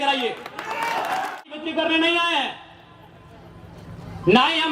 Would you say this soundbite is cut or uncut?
cut